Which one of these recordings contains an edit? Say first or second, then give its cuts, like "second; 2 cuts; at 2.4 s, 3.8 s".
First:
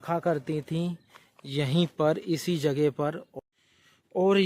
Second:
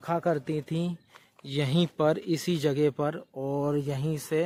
first; 1 cut; at 3.3 s